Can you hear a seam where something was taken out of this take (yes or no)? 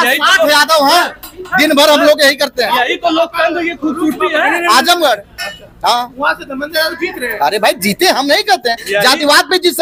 no